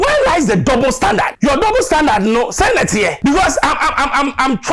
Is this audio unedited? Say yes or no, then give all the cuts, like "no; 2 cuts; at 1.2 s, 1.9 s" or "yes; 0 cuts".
no; 2 cuts; at 1.3 s, 3.1 s